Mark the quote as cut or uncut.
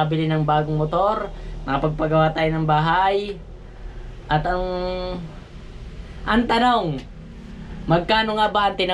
uncut